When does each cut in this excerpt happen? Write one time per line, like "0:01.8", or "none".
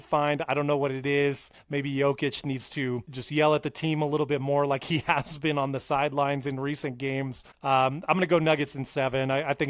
0:01.5
0:03.2
0:07.4